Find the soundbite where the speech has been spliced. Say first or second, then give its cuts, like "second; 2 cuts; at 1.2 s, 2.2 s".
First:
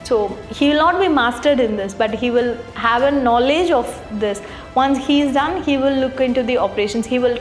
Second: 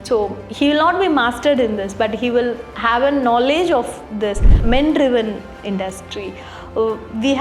second; 1 cut; at 4.5 s